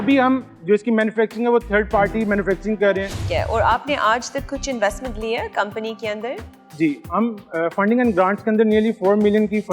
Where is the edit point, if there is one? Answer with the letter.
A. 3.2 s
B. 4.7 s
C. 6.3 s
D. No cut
A